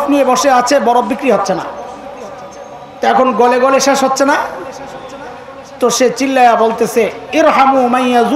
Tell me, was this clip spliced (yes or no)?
no